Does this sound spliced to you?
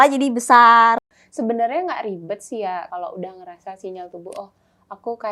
yes; 2 cuts; at 1.0 s, 2.9 s

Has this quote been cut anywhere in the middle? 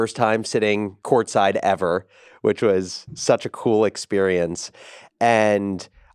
yes; 1 cut; at 0.9 s

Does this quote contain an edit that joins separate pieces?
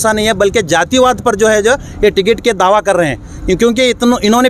no; 0 cuts

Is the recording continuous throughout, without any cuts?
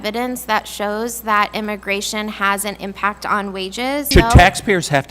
no; 1 cut; at 4.1 s

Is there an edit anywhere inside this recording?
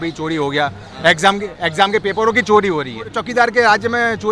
yes; 1 cut; at 3.2 s

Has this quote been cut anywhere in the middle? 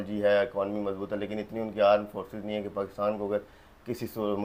no; 0 cuts

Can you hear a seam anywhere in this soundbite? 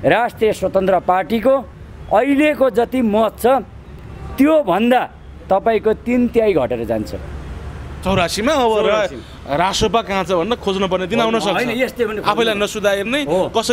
no; 0 cuts

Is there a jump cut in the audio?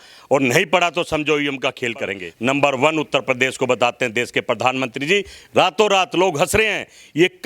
yes; 1 cut; at 2.2 s

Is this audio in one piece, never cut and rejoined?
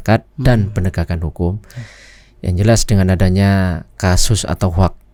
yes; 0 cuts

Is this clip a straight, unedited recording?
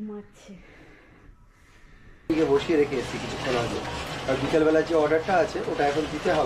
no; 1 cut; at 2.2 s

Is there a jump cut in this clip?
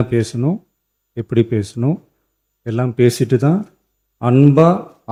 no; 0 cuts

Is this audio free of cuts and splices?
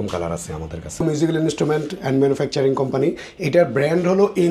no; 1 cut; at 1.0 s

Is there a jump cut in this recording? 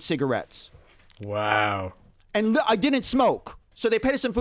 no; 0 cuts

